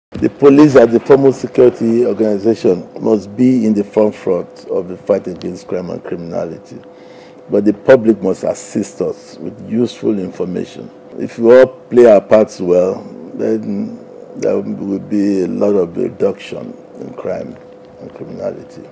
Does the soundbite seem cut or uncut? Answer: cut